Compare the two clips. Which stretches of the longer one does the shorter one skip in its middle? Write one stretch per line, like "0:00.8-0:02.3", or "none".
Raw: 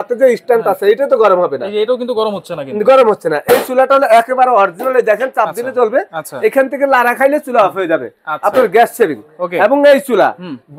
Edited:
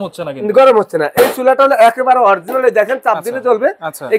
none